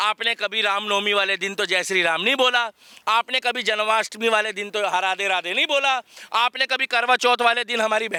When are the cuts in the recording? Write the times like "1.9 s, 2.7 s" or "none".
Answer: none